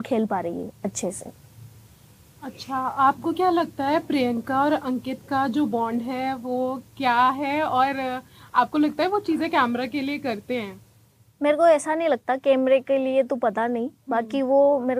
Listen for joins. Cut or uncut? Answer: uncut